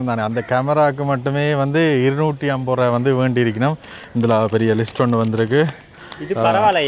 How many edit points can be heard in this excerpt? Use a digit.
0